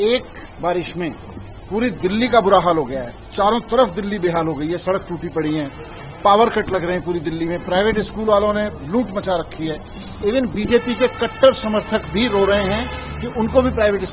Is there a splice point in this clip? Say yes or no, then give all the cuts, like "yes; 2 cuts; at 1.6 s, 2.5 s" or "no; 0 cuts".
no; 0 cuts